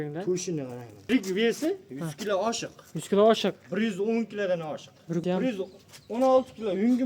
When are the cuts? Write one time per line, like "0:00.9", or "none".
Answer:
0:01.1
0:05.2